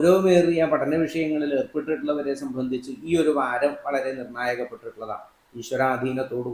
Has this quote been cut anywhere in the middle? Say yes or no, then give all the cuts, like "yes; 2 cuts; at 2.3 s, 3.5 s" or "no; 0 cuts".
no; 0 cuts